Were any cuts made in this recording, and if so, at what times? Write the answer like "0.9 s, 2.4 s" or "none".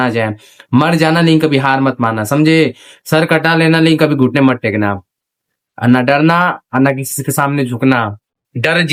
none